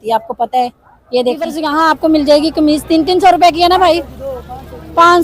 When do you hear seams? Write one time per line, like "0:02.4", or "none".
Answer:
0:01.6